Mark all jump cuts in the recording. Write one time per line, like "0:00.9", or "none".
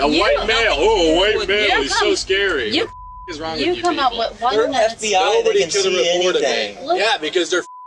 0:04.5
0:07.0